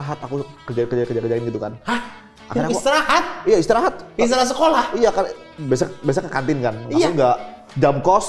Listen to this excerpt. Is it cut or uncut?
uncut